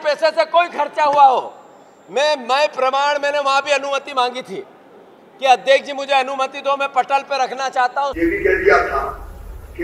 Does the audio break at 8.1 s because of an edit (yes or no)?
yes